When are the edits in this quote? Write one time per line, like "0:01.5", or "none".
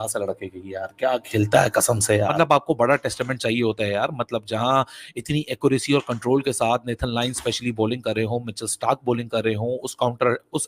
0:02.3